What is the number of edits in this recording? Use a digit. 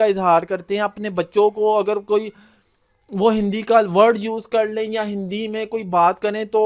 0